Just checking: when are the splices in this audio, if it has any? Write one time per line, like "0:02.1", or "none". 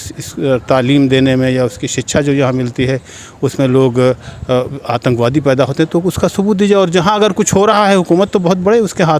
none

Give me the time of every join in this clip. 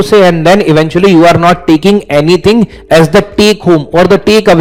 none

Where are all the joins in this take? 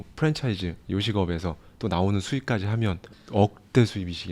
0:03.1

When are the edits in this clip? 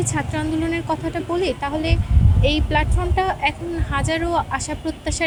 none

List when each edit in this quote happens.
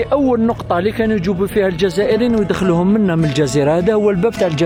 none

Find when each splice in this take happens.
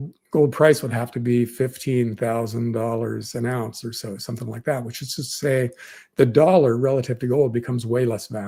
none

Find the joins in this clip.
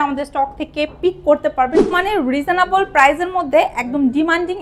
0:01.9

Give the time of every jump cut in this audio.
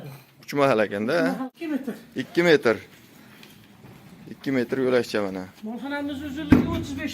0:01.5

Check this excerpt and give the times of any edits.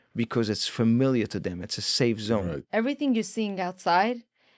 0:02.6

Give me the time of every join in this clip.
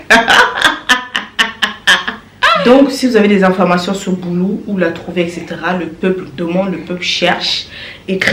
0:02.5

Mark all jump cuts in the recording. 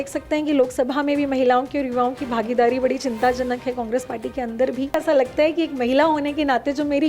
0:05.0

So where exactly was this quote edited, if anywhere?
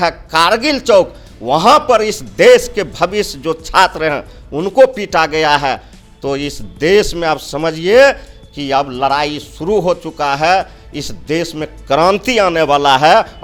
none

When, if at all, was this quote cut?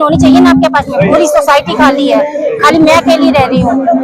none

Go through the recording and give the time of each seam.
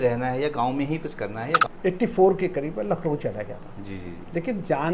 0:01.6

